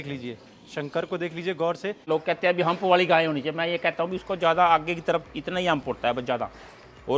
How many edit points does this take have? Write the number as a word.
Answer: one